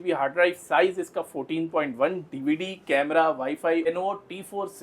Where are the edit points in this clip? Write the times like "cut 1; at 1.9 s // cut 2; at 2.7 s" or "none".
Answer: cut 1; at 3.9 s